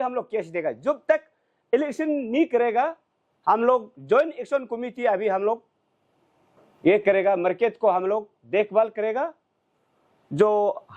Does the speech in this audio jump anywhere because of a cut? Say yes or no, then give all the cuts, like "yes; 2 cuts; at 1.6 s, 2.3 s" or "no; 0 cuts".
no; 0 cuts